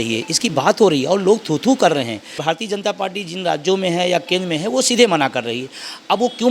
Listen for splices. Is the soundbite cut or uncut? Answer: cut